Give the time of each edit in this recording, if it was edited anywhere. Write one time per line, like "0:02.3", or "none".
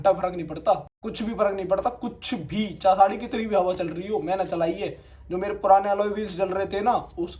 0:01.0